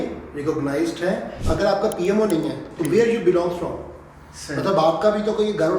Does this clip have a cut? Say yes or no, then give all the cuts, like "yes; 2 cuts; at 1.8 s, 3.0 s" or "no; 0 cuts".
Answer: yes; 1 cut; at 1.3 s